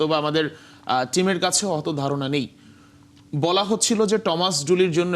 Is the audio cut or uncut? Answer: uncut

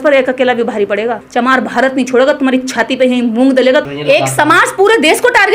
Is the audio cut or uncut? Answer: cut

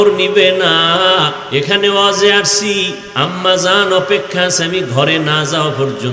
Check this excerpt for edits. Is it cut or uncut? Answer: cut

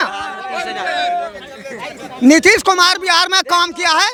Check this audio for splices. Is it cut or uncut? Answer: uncut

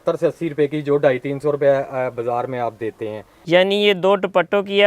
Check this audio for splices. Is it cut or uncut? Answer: cut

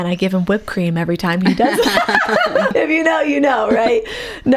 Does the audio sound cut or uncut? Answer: cut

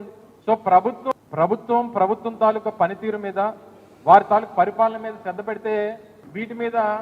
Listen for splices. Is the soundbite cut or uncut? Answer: cut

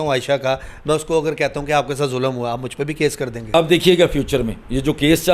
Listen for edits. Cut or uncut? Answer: cut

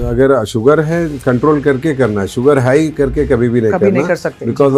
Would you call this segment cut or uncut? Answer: uncut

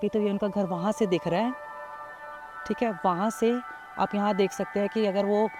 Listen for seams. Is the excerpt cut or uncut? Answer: uncut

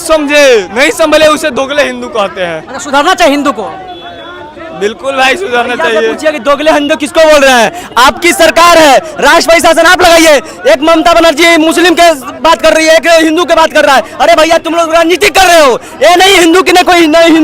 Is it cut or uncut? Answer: uncut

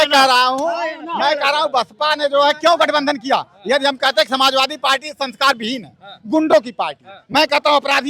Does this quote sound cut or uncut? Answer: uncut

